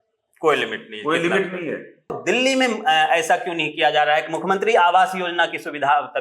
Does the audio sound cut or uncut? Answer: cut